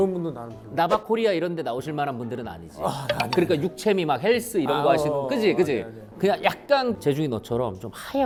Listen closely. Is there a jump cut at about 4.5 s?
no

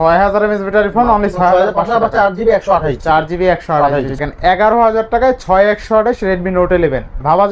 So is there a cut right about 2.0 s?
no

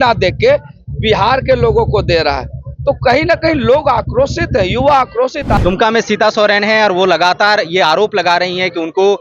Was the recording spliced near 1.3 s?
no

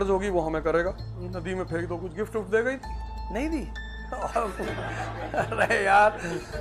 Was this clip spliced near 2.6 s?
no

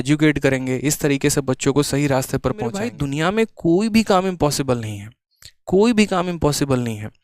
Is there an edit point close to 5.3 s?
no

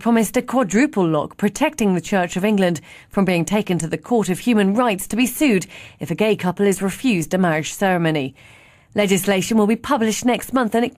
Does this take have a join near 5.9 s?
yes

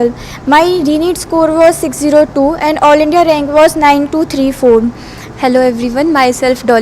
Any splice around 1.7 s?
no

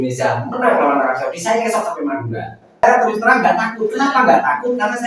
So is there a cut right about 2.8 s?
yes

